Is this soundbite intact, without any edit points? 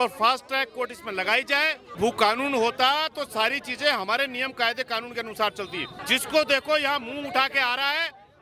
no; 2 cuts; at 1.9 s, 6.0 s

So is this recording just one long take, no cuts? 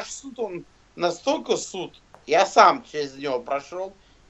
yes; 0 cuts

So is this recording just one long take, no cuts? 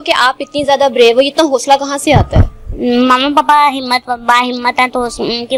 yes; 0 cuts

